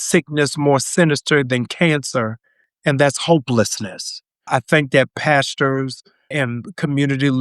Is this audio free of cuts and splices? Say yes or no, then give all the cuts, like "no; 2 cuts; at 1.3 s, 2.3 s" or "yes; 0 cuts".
no; 2 cuts; at 4.5 s, 6.3 s